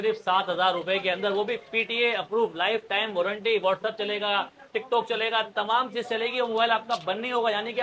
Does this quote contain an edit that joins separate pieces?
no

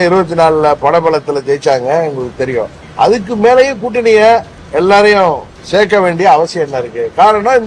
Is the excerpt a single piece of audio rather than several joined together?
no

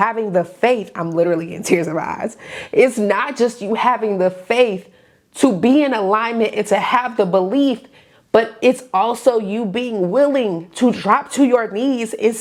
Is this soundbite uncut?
yes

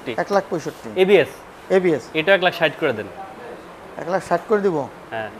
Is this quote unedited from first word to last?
yes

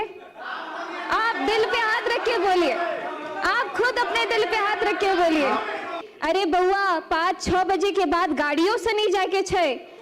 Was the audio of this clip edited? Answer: yes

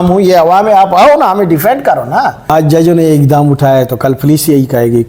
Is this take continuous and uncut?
no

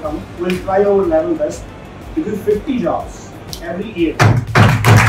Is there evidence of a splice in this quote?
no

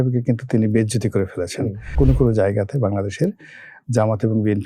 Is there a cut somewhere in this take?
yes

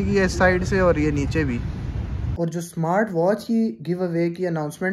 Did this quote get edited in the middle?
yes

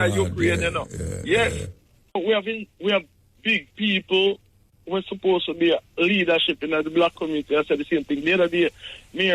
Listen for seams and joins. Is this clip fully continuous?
no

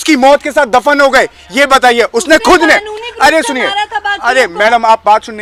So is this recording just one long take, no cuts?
yes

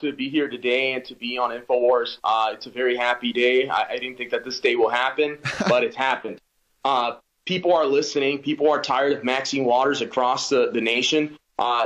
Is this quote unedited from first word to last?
yes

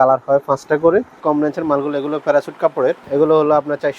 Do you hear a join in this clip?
yes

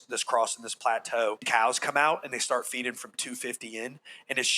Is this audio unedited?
no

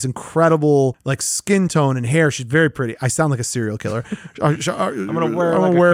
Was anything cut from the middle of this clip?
no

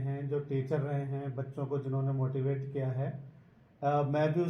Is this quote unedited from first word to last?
yes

